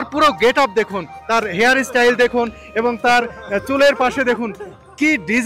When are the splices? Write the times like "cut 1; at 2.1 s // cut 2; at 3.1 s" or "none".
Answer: none